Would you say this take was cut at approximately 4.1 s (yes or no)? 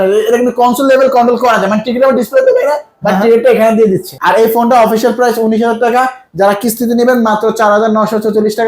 yes